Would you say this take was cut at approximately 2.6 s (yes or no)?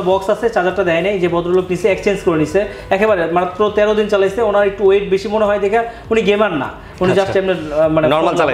no